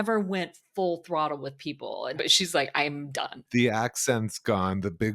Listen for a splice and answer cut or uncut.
cut